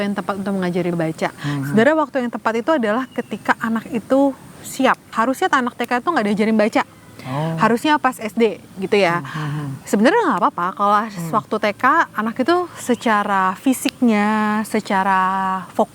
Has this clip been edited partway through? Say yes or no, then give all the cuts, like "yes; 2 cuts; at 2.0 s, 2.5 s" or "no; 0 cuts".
yes; 2 cuts; at 0.9 s, 5.1 s